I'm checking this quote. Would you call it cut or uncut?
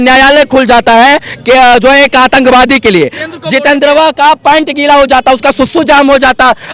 cut